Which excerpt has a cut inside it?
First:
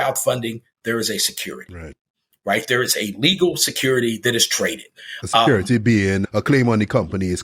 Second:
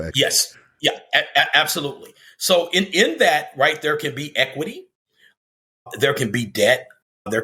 first; 1 cut; at 6.2 s

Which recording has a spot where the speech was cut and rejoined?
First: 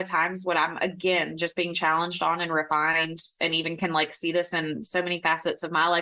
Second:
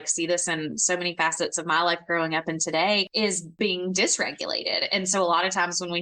second; 1 cut; at 3.5 s

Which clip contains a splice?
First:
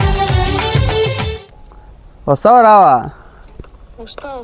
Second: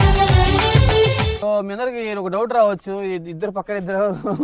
second; 1 cut; at 1.3 s

